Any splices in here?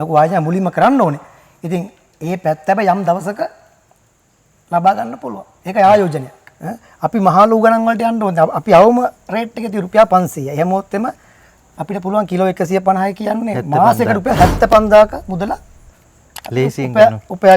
yes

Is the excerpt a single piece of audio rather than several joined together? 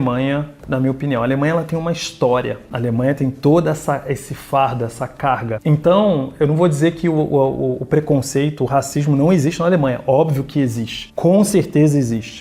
yes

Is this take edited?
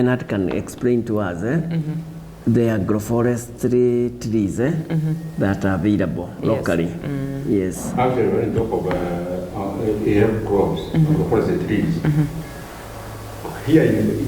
no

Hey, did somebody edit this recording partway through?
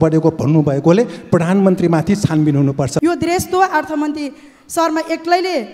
yes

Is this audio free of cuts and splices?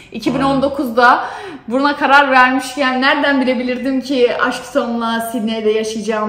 yes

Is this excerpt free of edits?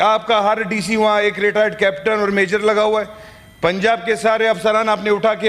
yes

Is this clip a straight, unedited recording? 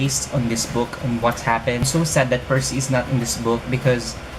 no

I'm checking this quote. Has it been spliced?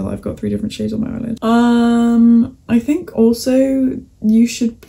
yes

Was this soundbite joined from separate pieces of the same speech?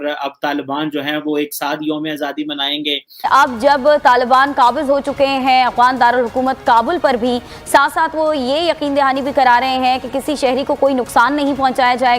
yes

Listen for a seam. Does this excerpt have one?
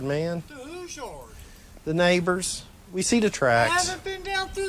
no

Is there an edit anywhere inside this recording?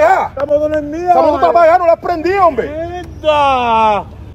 no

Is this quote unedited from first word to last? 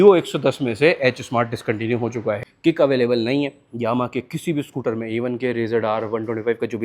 no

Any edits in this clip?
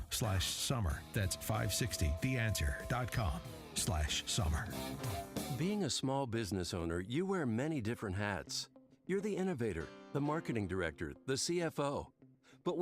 yes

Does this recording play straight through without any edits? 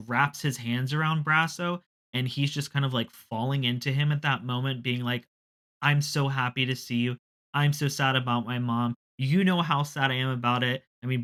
yes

